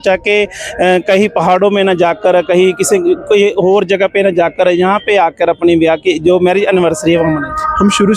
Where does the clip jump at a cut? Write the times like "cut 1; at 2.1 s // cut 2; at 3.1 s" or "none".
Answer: none

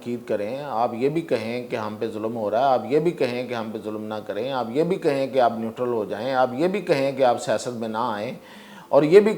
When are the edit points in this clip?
none

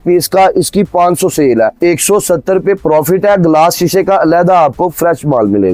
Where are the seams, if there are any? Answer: none

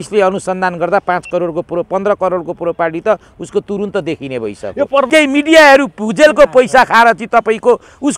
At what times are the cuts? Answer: cut 1; at 5.1 s

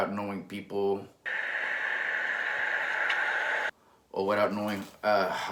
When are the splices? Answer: none

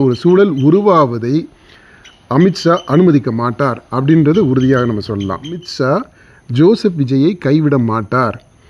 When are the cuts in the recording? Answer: cut 1; at 5.7 s

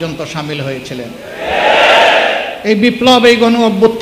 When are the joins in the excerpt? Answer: cut 1; at 2.5 s

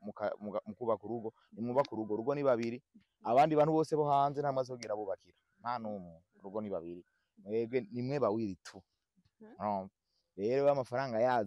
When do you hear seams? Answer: none

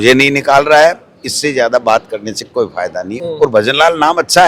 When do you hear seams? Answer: cut 1; at 3.1 s

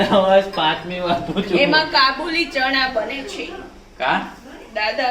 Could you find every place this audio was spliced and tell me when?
none

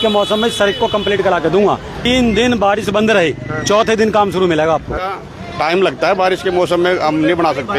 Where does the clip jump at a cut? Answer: cut 1; at 2.1 s // cut 2; at 4.9 s

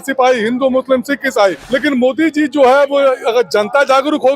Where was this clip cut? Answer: cut 1; at 1.6 s

